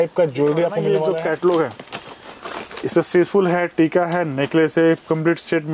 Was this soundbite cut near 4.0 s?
no; 1 cut; at 0.9 s

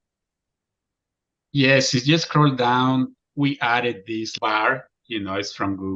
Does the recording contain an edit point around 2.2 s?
no; 1 cut; at 4.3 s

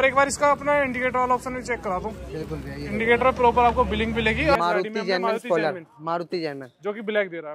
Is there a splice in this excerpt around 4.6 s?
yes; 1 cut; at 4.6 s

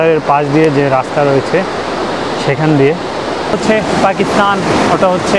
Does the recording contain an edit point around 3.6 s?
yes; 1 cut; at 3.6 s

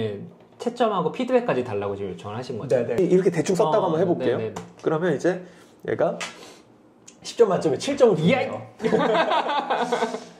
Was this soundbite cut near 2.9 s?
yes; 1 cut; at 2.9 s

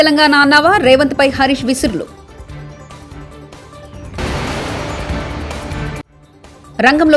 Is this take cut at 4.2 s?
no; 0 cuts

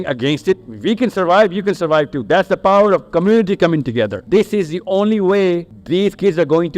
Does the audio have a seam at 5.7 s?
yes; 2 cuts; at 4.2 s, 5.7 s

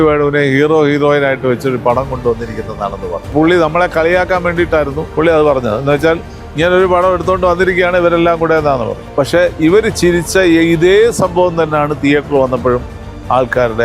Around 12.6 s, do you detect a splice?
no; 3 cuts; at 3.3 s, 5.0 s, 9.0 s

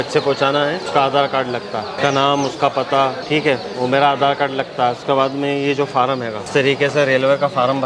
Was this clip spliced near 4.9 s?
no; 4 cuts; at 0.9 s, 2.0 s, 3.2 s, 6.4 s

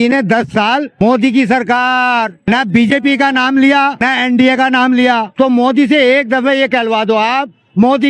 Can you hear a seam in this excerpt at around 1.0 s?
yes; 4 cuts; at 1.0 s, 2.4 s, 4.1 s, 5.3 s

